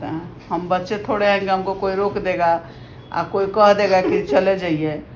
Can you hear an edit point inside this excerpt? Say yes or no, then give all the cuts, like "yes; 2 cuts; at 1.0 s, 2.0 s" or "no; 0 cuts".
no; 0 cuts